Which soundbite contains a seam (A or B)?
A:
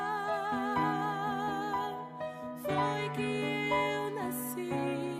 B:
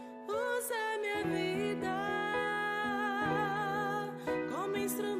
B